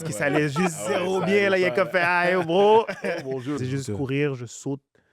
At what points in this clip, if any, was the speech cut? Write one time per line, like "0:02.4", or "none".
0:03.6